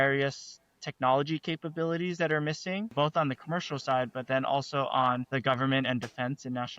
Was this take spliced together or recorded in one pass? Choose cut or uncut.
cut